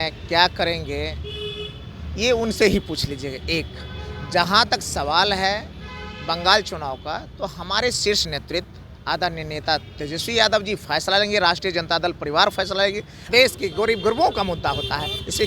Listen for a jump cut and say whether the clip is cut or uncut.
cut